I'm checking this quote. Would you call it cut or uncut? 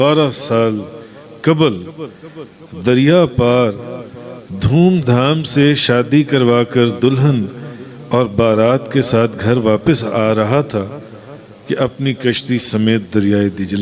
uncut